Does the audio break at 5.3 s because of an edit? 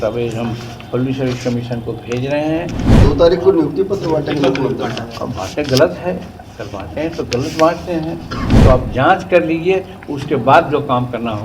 no; 2 cuts; at 2.8 s, 8.6 s

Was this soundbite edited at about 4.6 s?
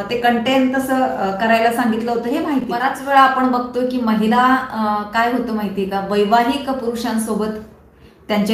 no; 1 cut; at 3.0 s

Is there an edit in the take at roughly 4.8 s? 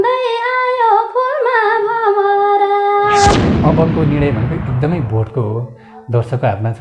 no; 1 cut; at 3.5 s

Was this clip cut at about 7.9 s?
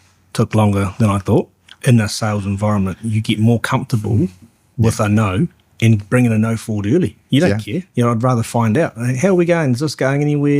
no; 1 cut; at 1.6 s

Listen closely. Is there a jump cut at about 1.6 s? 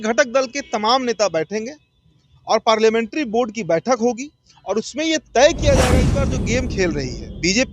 no; 1 cut; at 6.3 s

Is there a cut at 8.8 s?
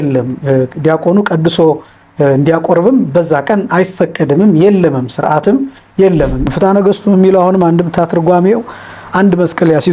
no; 1 cut; at 6.5 s

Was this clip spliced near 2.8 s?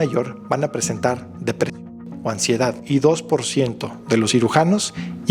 yes; 1 cut; at 2.8 s

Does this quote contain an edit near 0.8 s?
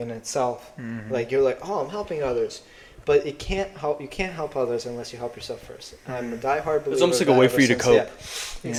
no; 0 cuts

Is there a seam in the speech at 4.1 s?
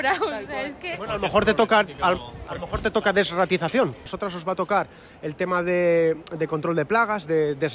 yes; 1 cut; at 4.1 s

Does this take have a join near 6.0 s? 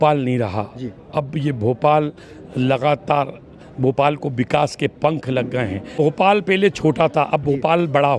yes; 1 cut; at 6.0 s

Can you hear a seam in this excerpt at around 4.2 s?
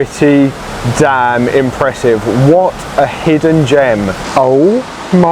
yes; 1 cut; at 4.2 s

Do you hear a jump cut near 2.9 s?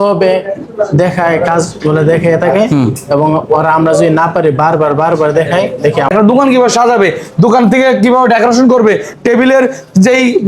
no; 1 cut; at 6.1 s

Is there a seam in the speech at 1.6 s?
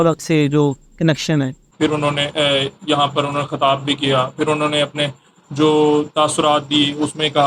yes; 1 cut; at 1.6 s

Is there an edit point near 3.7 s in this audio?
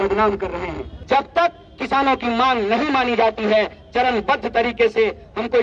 no; 1 cut; at 0.9 s

